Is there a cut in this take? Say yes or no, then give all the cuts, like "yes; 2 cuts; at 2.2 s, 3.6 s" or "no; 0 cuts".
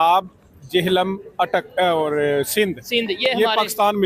no; 0 cuts